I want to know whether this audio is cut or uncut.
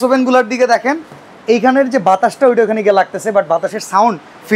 uncut